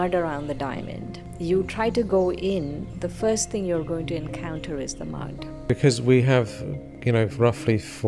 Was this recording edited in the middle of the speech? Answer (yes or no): yes